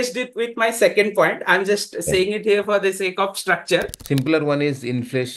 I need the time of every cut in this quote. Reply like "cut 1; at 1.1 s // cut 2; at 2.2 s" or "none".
cut 1; at 4.0 s